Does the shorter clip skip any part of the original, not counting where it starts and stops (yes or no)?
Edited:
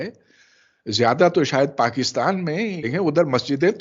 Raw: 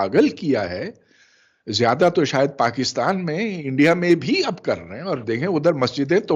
yes